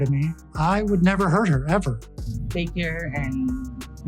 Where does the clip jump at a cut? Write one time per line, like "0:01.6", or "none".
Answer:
0:02.1